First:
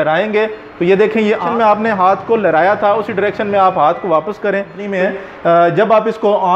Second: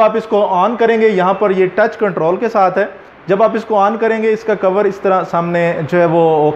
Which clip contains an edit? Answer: first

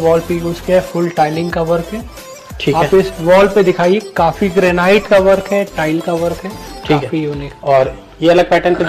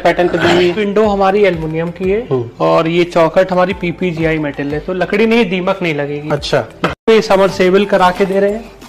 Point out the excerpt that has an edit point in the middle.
second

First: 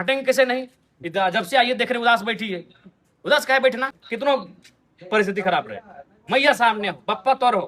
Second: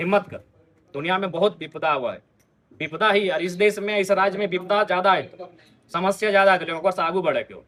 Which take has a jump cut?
first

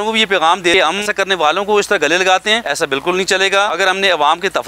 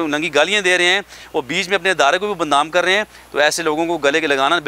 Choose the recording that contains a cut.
first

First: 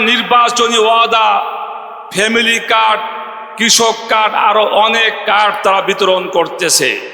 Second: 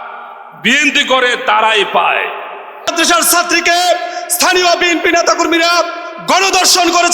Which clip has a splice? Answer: second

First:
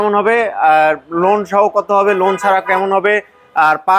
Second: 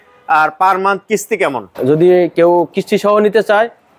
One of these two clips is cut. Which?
second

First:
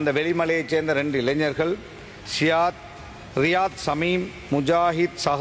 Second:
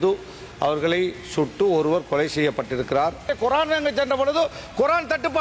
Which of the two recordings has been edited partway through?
second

